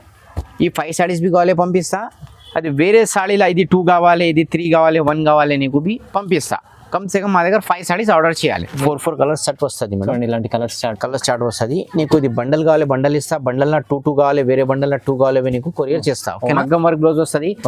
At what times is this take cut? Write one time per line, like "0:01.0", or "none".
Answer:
0:08.8
0:16.6